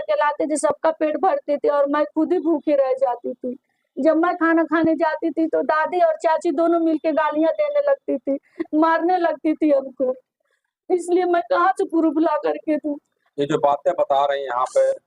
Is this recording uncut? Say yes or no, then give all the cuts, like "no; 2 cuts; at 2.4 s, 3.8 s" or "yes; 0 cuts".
yes; 0 cuts